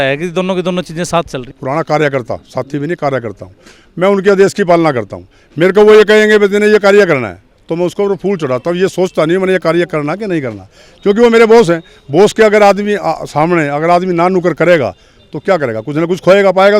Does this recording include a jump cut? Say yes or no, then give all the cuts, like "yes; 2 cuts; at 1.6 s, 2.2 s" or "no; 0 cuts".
yes; 1 cut; at 1.5 s